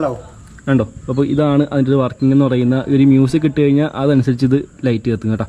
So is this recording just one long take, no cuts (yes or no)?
yes